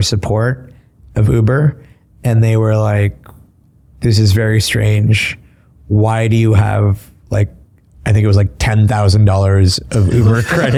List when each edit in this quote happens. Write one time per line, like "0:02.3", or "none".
none